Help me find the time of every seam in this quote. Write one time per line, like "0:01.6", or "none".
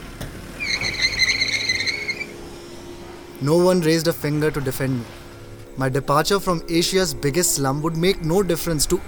none